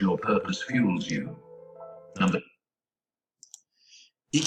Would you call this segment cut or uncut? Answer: uncut